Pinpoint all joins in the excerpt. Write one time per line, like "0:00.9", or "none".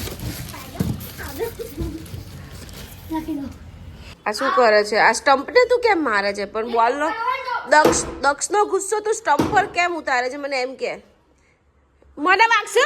0:04.1